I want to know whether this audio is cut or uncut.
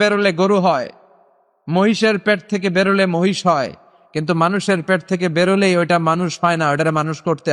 uncut